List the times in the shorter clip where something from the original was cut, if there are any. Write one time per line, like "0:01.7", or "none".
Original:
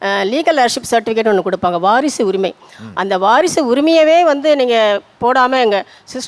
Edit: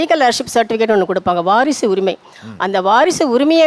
none